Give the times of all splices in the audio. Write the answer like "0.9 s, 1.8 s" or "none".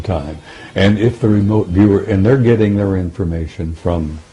none